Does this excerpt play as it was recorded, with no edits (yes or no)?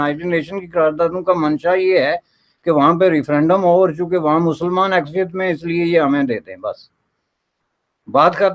yes